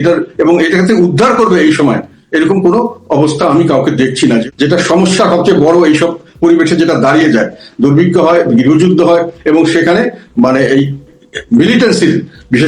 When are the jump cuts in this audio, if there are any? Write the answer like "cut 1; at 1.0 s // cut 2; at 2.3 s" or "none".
cut 1; at 4.5 s